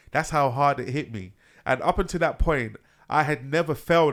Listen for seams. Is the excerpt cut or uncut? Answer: uncut